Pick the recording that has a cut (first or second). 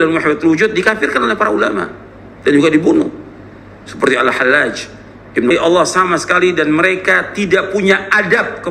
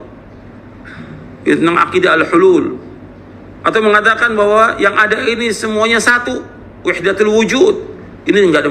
first